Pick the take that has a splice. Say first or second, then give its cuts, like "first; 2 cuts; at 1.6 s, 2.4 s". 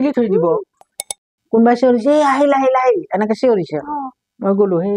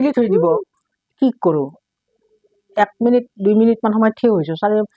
first; 1 cut; at 1.1 s